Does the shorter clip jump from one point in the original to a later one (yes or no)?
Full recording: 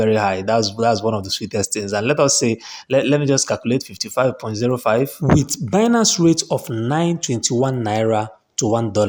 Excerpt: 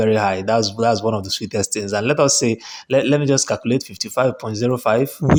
no